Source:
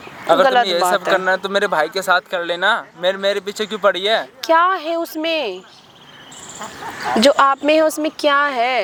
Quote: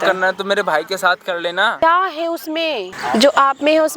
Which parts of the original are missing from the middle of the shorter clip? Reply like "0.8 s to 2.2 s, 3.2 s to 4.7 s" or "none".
2.8 s to 4.4 s, 5.6 s to 7.0 s

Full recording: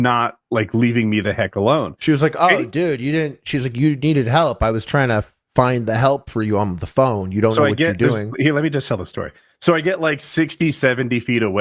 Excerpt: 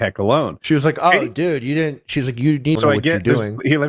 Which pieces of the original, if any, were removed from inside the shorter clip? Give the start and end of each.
4.1 s to 7.5 s

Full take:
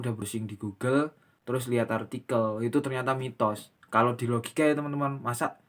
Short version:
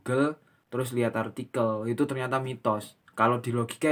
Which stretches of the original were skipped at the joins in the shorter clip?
none

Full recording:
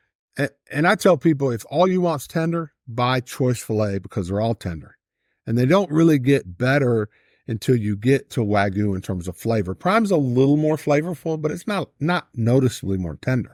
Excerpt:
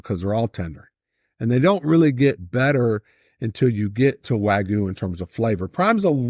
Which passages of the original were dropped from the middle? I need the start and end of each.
none

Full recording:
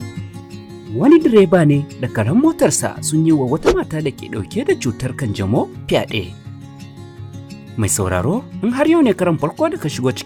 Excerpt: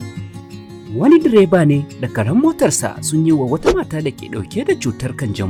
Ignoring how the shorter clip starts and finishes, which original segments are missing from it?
none

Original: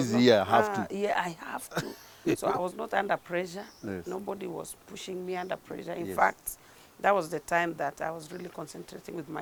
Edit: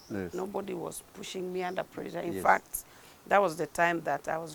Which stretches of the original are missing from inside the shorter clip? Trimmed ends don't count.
none

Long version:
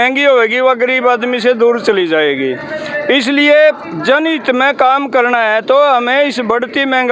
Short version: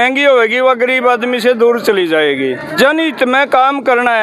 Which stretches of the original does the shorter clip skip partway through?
2.6 s to 3.9 s

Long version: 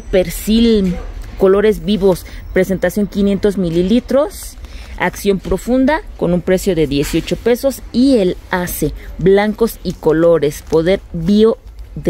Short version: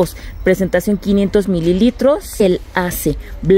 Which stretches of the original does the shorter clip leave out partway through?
4.5 s to 8.2 s

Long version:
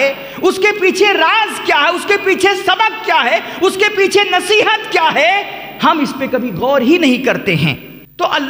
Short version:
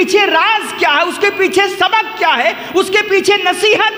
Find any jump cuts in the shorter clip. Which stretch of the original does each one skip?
none

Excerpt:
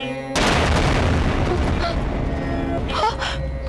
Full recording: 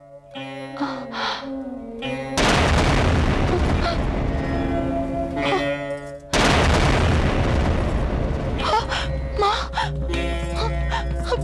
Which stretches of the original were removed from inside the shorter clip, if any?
4.8 s to 8.5 s

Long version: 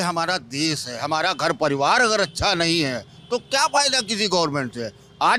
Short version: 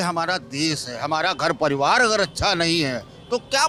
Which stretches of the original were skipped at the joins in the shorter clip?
none

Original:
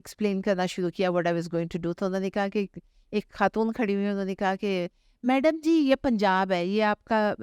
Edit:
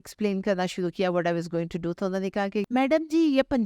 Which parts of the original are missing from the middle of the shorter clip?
2.7 s to 5.2 s

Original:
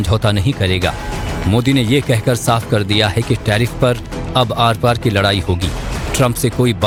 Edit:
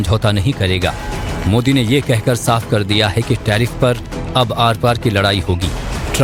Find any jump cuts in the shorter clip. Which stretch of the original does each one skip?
none

